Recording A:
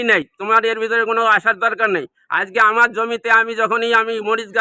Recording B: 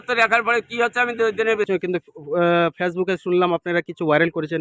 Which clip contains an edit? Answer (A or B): B